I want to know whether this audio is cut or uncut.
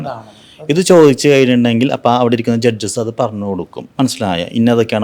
cut